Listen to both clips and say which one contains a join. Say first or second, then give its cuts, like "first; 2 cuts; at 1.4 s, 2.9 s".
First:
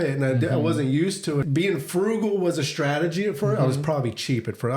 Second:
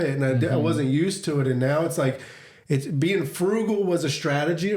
first; 1 cut; at 1.4 s